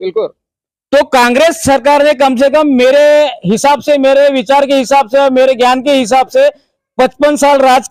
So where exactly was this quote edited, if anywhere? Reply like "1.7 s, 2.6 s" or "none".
none